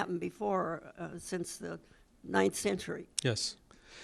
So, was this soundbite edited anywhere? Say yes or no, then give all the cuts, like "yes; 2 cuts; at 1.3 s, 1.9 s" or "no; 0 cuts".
no; 0 cuts